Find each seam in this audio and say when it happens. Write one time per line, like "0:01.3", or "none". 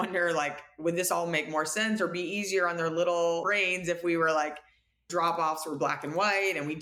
none